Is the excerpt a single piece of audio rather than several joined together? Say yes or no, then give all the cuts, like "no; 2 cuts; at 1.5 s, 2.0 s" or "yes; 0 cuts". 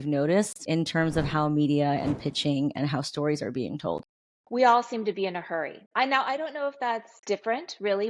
yes; 0 cuts